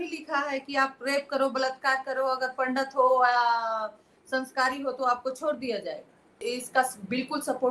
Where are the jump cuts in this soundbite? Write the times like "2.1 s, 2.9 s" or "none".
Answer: 6.4 s